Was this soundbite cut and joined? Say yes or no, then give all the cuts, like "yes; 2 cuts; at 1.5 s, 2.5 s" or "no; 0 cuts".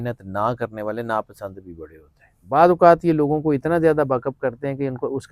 yes; 1 cut; at 2.4 s